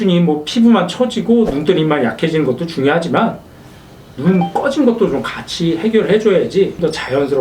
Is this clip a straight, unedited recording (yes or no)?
yes